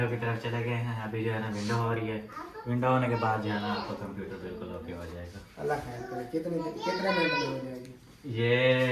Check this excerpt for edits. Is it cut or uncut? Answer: uncut